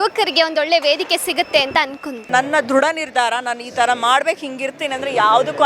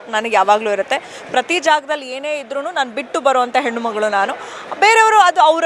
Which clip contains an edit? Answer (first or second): first